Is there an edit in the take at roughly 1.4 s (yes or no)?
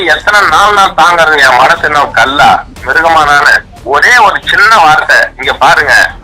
no